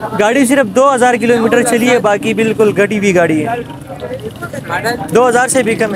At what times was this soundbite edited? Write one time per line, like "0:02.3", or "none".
none

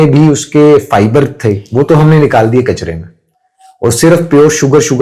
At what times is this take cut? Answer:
none

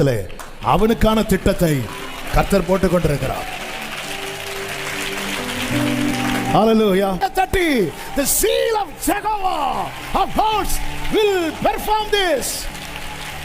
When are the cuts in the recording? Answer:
0:07.2

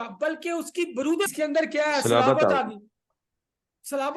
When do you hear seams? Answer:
0:01.3

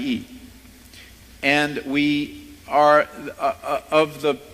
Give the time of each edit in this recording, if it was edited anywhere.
0:03.2

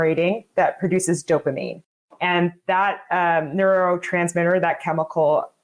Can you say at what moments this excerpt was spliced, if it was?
none

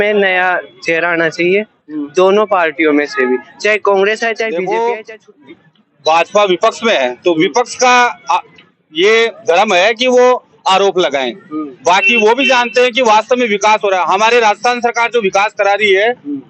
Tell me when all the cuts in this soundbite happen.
0:04.5

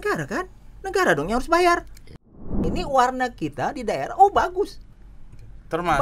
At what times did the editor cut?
0:02.5

